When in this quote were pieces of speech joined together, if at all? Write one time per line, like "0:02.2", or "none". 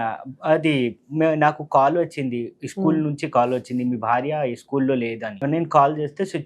0:05.4